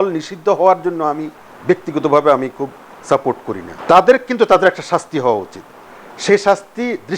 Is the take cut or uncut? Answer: cut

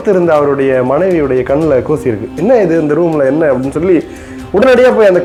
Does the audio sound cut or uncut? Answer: uncut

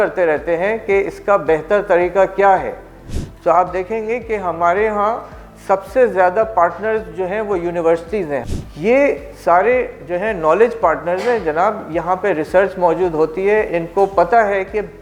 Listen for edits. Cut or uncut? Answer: cut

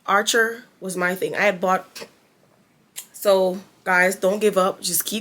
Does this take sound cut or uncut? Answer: cut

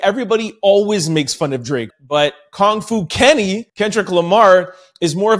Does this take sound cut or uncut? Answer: cut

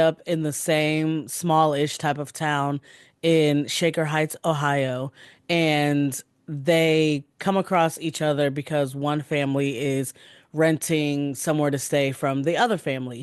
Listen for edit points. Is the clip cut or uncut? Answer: uncut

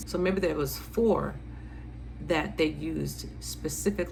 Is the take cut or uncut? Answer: uncut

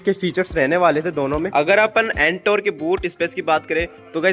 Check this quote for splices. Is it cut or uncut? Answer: cut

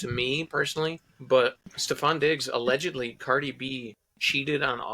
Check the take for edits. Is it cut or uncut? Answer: cut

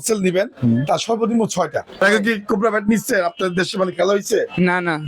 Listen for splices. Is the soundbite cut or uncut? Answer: cut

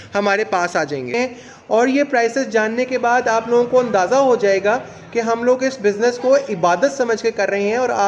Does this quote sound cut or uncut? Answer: cut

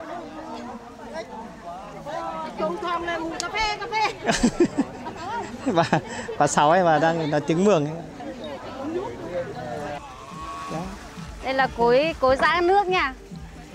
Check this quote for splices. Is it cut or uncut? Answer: cut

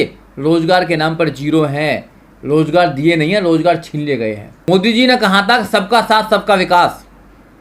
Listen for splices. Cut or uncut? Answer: cut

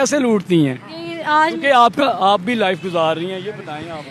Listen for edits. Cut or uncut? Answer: uncut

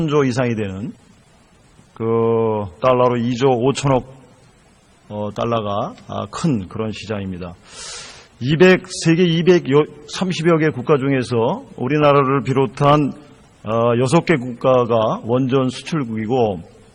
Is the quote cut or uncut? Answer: uncut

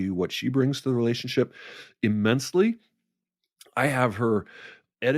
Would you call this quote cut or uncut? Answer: uncut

